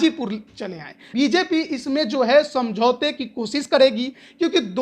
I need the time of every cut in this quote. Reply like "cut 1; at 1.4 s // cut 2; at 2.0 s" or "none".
cut 1; at 1.0 s